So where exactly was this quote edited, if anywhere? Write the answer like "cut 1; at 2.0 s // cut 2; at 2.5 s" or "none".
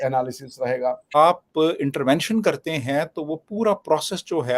cut 1; at 1.1 s